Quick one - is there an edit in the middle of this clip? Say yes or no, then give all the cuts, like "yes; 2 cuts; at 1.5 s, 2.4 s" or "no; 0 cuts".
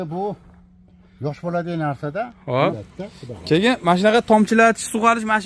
yes; 1 cut; at 2.8 s